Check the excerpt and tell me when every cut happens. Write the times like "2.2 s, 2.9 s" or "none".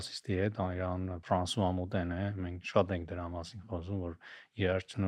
1.2 s